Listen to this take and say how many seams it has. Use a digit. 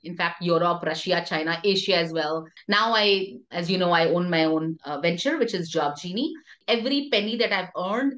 2